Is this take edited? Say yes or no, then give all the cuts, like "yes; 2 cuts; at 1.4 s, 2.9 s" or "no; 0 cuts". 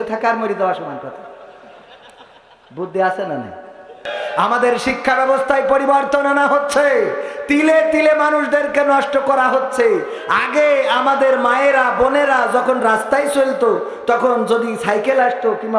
yes; 1 cut; at 4.1 s